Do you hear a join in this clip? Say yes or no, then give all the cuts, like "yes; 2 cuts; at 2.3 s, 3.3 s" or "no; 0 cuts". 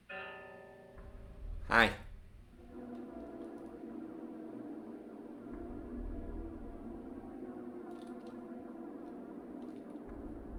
no; 0 cuts